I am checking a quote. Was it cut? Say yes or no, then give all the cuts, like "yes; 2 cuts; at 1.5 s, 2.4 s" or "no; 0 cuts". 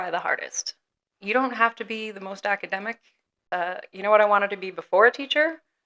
yes; 1 cut; at 3.4 s